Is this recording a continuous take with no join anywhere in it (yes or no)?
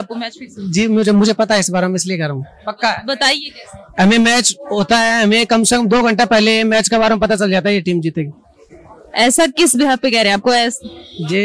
yes